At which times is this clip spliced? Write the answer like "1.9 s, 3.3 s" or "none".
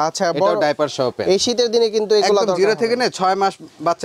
none